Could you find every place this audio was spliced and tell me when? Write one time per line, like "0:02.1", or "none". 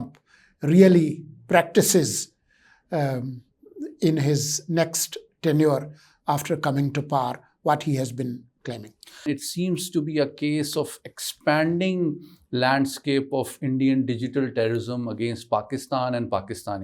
0:09.3